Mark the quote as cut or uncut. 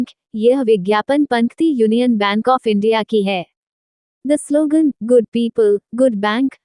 uncut